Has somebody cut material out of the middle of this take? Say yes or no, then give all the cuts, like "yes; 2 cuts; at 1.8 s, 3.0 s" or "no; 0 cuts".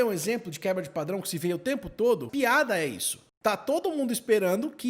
yes; 2 cuts; at 2.1 s, 3.3 s